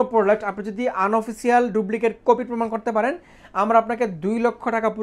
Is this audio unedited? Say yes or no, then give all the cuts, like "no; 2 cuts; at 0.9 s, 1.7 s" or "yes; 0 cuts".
yes; 0 cuts